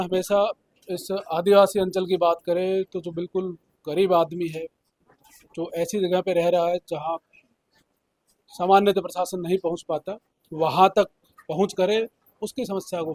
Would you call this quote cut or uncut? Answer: uncut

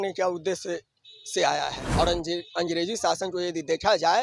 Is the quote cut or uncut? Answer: cut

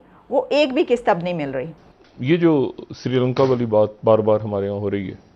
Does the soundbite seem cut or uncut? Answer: cut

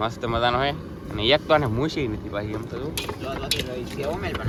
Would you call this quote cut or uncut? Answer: uncut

